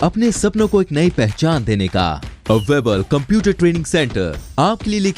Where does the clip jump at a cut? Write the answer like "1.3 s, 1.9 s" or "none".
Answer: none